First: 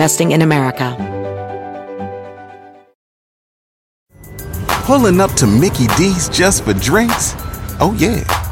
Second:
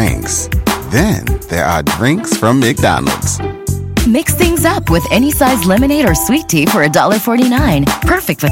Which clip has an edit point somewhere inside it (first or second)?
first